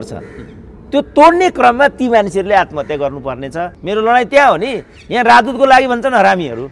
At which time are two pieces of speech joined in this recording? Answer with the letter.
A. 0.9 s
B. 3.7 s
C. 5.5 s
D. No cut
B